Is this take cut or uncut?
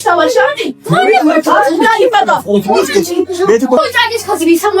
cut